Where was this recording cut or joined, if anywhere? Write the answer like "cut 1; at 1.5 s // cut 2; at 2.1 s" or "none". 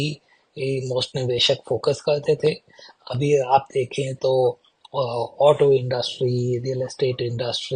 none

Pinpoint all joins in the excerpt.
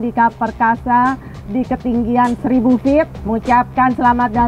cut 1; at 2.4 s // cut 2; at 3.2 s

